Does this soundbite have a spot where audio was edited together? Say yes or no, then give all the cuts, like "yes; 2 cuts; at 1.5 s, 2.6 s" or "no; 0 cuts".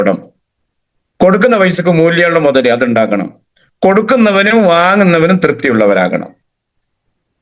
no; 0 cuts